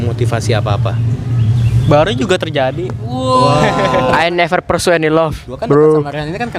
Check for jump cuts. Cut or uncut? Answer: cut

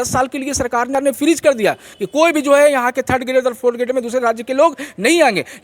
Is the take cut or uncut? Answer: cut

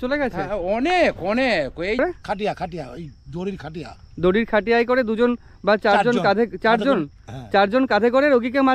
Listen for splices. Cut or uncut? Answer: cut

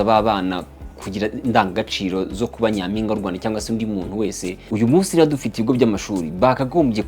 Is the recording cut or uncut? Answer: cut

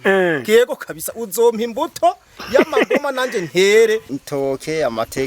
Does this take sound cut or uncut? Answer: cut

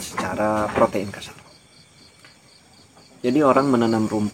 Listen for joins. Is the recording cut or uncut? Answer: uncut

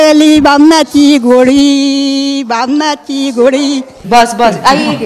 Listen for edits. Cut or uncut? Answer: cut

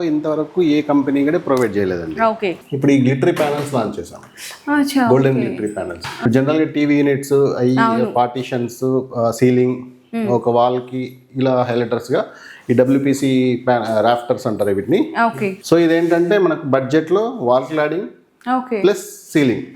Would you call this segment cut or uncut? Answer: cut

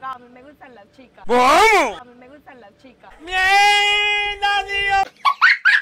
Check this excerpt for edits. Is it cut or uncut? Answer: uncut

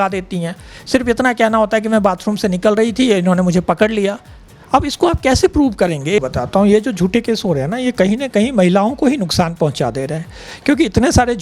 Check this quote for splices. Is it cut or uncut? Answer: cut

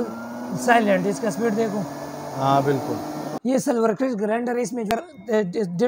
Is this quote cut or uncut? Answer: cut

